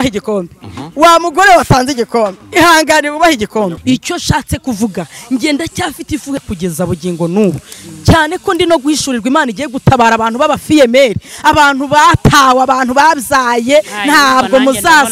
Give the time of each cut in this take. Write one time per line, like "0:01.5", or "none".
0:03.8
0:06.4